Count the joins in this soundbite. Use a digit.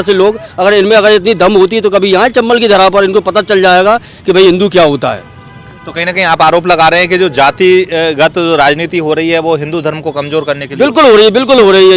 0